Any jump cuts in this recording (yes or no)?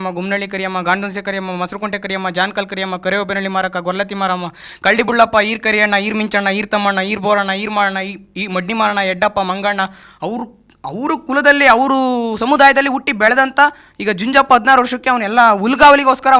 no